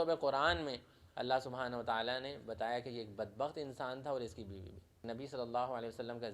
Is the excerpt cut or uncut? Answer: cut